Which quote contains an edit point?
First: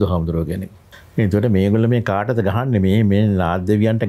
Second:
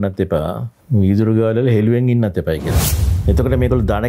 second; 1 cut; at 2.9 s

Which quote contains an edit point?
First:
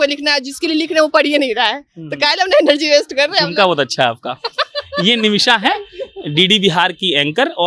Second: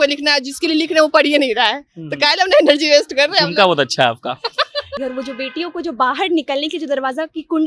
second; 1 cut; at 4.9 s

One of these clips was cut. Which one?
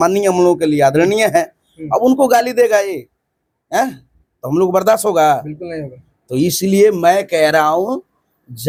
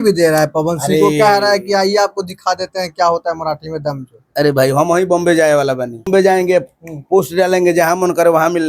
second; 1 cut; at 6.3 s

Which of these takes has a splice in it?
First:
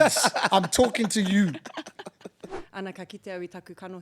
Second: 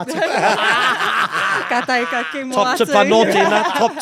first; 1 cut; at 2.5 s

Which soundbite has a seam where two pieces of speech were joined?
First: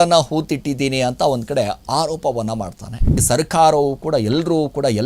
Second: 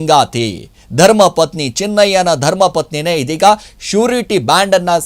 first; 1 cut; at 3.2 s

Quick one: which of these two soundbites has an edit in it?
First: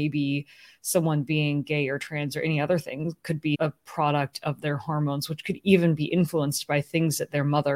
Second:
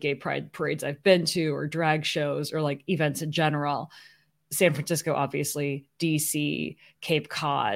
first; 1 cut; at 3.6 s

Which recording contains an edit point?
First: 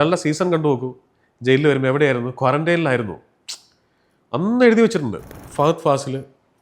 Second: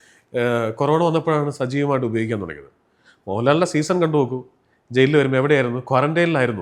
first; 1 cut; at 5.4 s

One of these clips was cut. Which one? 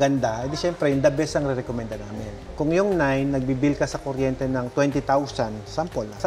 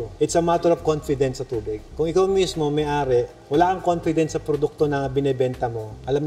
first; 1 cut; at 2.4 s

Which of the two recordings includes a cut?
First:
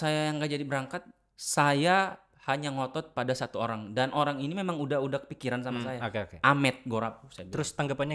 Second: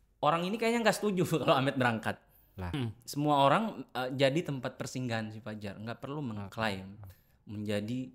second; 1 cut; at 2.7 s

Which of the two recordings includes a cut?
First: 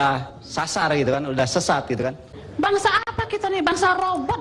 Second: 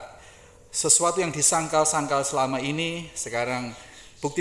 first; 1 cut; at 2.2 s

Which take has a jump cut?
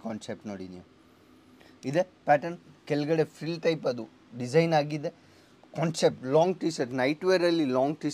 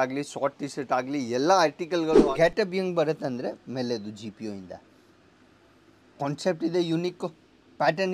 second; 1 cut; at 2.2 s

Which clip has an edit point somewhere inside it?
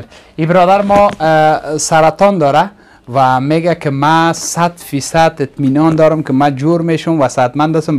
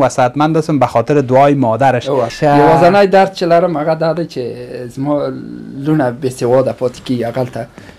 second; 1 cut; at 2.3 s

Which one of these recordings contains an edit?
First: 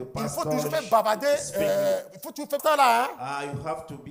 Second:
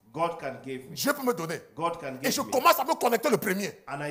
first; 1 cut; at 2.6 s

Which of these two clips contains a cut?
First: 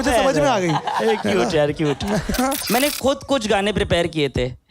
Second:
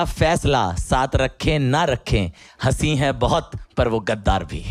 first; 1 cut; at 2.6 s

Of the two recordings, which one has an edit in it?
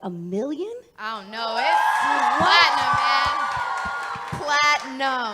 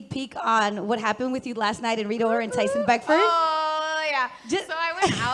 first; 1 cut; at 3.0 s

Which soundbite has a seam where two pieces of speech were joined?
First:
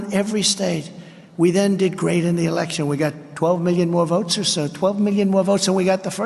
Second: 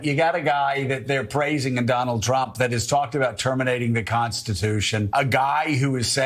second; 1 cut; at 5.1 s

